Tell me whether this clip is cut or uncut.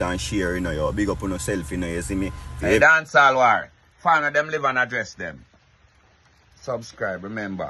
cut